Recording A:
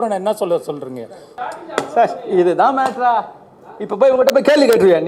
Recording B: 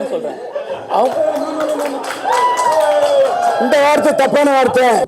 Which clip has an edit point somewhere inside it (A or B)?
A